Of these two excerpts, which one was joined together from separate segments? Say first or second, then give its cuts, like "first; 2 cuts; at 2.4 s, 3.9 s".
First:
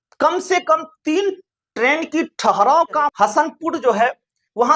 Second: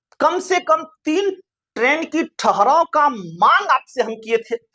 first; 1 cut; at 3.1 s